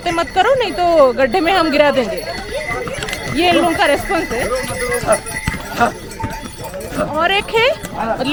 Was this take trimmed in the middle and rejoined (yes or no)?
no